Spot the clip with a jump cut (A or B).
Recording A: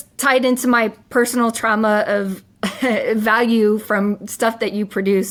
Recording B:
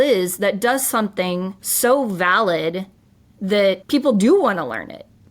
B